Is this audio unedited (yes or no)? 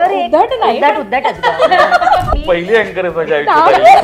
no